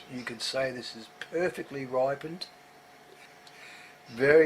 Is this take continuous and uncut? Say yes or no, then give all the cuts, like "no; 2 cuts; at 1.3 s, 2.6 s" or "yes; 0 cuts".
no; 1 cut; at 3.3 s